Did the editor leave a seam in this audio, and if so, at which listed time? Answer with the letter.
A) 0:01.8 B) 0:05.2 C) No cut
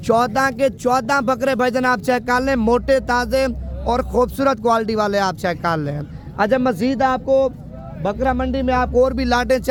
C